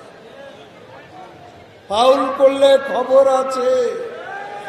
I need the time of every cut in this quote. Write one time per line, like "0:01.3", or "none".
none